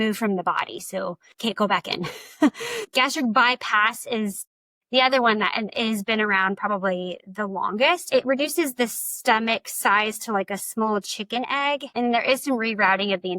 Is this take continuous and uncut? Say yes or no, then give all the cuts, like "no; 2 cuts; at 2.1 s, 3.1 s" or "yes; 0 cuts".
no; 3 cuts; at 2.8 s, 8.1 s, 11.9 s